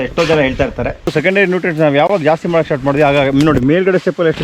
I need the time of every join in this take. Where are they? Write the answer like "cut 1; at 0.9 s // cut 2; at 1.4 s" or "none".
cut 1; at 1.1 s

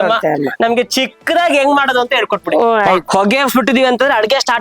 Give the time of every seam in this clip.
cut 1; at 3.1 s

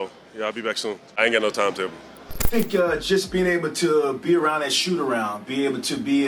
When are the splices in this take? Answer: cut 1; at 2.4 s

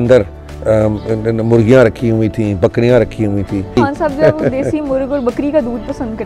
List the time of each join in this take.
cut 1; at 3.8 s

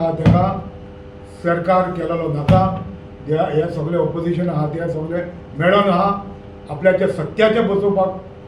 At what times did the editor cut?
none

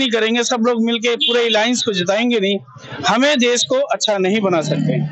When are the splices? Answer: none

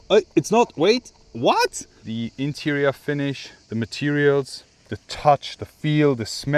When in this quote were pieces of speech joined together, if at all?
cut 1; at 2.0 s

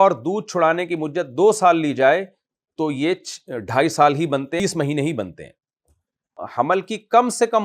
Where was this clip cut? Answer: cut 1; at 4.6 s // cut 2; at 6.4 s

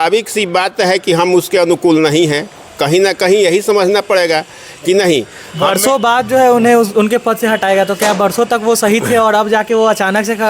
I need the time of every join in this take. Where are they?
none

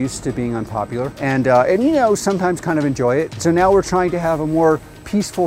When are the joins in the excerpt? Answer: cut 1; at 1.1 s // cut 2; at 3.3 s

